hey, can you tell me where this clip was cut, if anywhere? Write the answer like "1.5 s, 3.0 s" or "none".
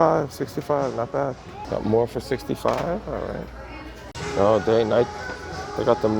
1.5 s, 3.5 s

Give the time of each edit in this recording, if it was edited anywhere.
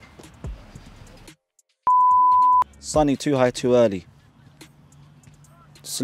none

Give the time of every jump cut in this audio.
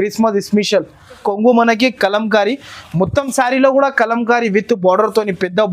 1.2 s

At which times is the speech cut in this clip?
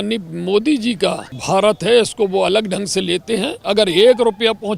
1.3 s, 3.6 s

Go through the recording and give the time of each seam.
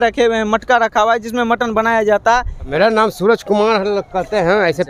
2.7 s

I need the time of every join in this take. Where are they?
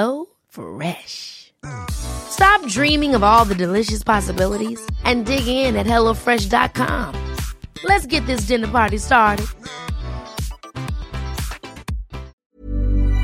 12.3 s

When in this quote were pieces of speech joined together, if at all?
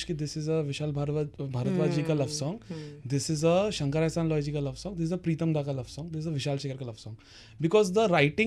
none

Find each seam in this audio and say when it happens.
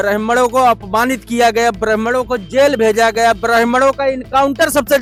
none

